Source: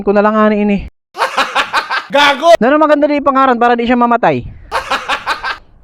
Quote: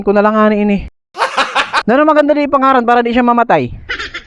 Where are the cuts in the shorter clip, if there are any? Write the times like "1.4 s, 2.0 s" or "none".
1.9 s